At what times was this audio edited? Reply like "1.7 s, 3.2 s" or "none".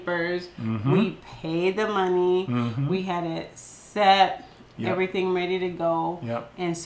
none